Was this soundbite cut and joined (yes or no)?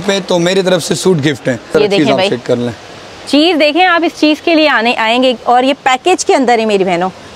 yes